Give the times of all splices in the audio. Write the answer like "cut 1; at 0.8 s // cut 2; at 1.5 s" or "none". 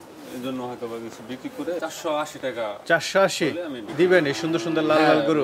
cut 1; at 1.8 s